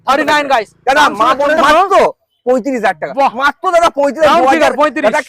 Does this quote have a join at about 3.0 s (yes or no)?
no